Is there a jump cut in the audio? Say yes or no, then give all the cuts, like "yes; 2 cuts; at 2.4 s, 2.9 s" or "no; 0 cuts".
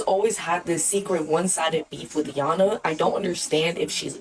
no; 0 cuts